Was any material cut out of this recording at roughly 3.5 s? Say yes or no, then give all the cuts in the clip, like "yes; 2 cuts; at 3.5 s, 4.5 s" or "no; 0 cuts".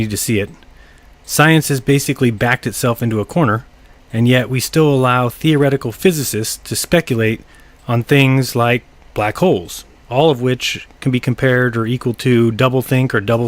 yes; 1 cut; at 3.5 s